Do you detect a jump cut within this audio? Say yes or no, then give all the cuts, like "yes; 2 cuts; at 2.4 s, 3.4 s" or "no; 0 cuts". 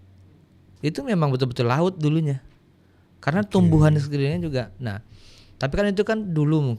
no; 0 cuts